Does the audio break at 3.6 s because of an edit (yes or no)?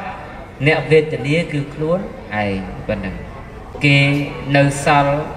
yes